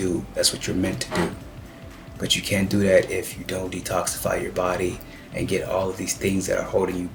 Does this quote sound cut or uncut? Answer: uncut